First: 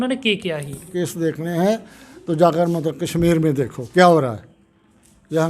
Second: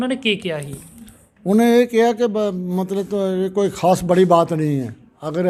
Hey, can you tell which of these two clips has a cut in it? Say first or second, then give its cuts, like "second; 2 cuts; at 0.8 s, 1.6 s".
first; 1 cut; at 0.9 s